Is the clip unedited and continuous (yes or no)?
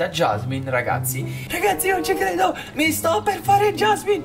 no